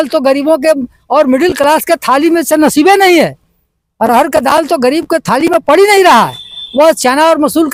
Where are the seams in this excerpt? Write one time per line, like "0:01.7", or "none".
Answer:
none